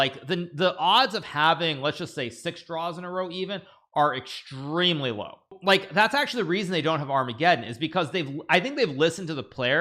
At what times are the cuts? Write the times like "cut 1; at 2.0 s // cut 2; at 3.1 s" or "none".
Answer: cut 1; at 5.6 s